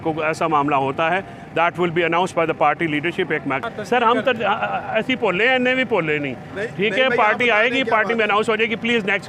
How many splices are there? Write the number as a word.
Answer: one